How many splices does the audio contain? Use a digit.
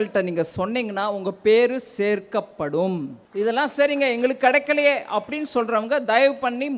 1